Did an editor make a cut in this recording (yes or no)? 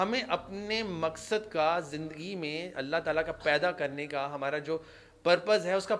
no